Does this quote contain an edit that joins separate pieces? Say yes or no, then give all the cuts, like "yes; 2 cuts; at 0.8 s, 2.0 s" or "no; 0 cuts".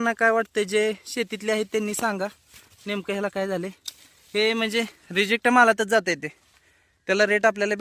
no; 0 cuts